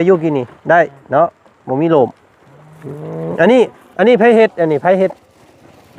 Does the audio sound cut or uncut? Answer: uncut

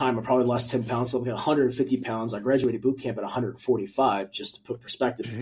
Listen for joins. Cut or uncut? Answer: uncut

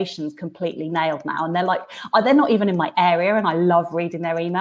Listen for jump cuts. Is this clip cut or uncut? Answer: uncut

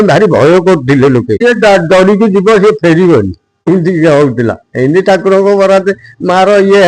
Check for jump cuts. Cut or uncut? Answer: cut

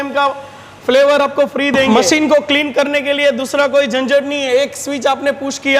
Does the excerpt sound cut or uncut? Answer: cut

